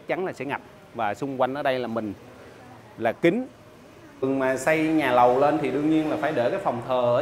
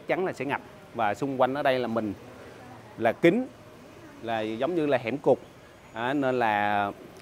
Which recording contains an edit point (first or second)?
first